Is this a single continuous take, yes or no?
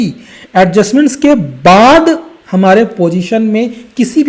yes